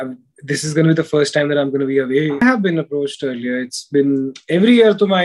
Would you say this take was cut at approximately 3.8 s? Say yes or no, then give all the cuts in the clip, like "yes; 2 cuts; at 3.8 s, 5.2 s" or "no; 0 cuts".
no; 1 cut; at 2.4 s